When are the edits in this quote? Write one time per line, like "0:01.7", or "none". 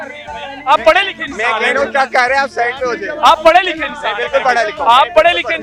none